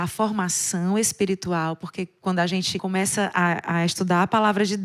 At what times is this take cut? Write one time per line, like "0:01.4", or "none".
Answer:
none